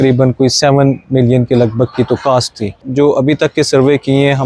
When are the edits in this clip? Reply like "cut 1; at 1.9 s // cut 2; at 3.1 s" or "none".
cut 1; at 2.8 s